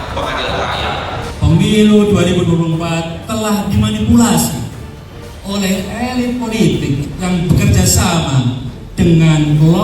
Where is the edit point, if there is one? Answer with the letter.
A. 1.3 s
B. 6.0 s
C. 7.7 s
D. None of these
A